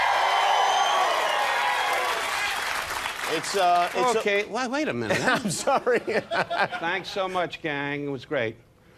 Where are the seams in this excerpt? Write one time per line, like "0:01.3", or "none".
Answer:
0:01.7